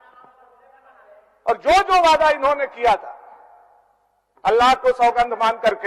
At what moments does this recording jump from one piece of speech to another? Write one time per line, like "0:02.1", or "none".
none

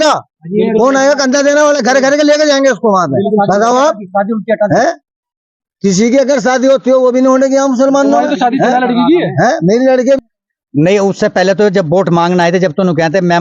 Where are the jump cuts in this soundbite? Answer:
0:10.2

